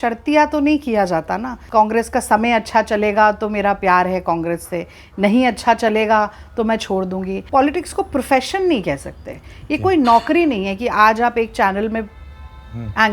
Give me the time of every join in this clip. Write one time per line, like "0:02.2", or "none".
0:01.6
0:07.4

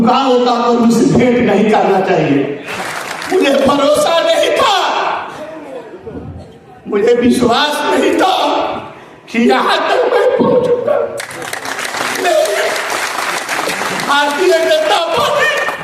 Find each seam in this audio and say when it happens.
0:02.6

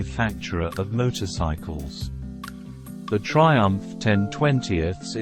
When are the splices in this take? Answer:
0:01.6
0:03.1

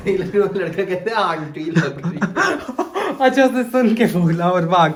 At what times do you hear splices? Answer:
none

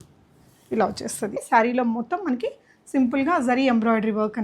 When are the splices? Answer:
0:01.4

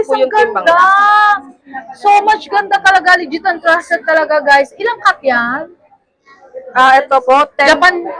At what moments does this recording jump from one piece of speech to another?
none

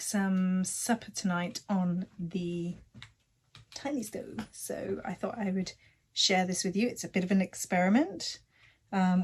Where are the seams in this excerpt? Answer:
none

